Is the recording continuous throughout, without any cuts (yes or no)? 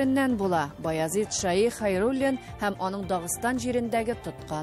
yes